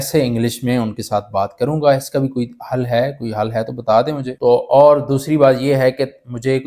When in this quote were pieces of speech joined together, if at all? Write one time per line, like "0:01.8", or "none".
0:04.3